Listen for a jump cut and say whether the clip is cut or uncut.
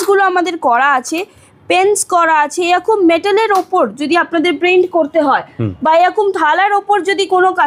uncut